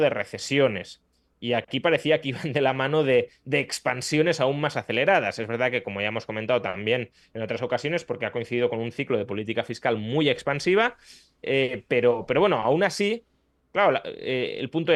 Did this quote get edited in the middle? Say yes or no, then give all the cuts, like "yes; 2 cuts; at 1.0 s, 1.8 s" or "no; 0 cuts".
no; 0 cuts